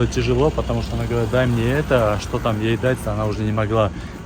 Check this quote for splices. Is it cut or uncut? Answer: uncut